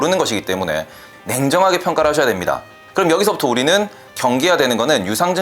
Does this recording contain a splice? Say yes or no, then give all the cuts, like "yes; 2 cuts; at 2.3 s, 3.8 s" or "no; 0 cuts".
yes; 2 cuts; at 1.0 s, 2.8 s